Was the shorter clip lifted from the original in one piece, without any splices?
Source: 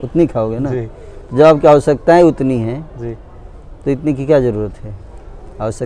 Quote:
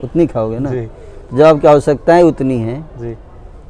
yes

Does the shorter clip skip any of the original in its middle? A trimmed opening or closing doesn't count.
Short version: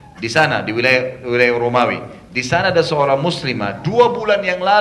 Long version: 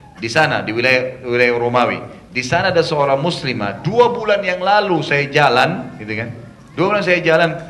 no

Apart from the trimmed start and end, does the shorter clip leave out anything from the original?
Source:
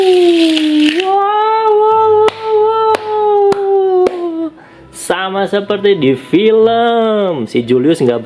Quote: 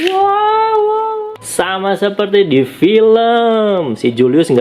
yes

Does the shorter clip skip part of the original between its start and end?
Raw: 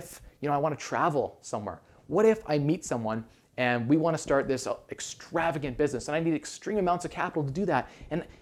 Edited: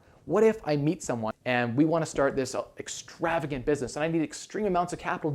yes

